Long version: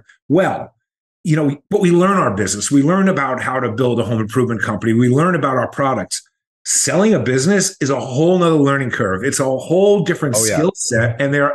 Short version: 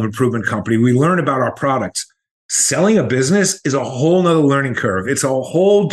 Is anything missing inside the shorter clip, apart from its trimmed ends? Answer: no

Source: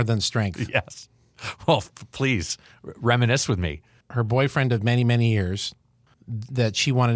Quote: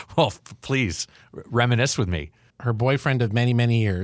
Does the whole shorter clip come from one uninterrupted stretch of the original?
yes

